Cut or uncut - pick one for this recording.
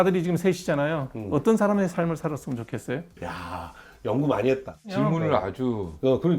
cut